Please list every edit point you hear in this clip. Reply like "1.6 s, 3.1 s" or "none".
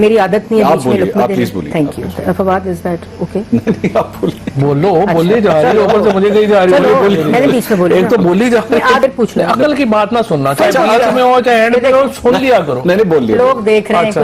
9.0 s